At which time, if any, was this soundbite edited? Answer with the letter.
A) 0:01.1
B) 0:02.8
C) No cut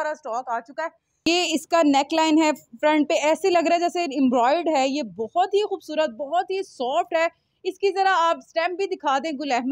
A